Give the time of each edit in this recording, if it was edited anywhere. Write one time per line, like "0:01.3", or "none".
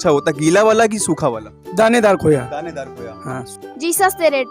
0:03.4